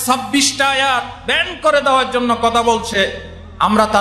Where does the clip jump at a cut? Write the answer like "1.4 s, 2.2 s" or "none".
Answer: none